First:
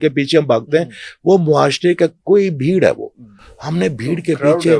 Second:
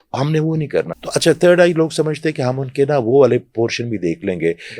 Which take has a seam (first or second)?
second